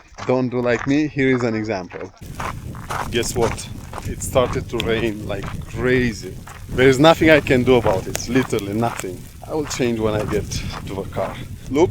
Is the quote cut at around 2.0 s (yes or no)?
yes